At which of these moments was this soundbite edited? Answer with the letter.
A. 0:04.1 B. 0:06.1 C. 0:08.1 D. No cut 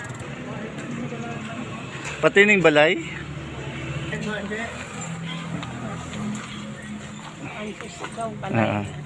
A